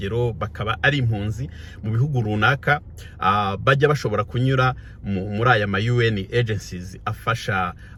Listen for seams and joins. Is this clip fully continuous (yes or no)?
yes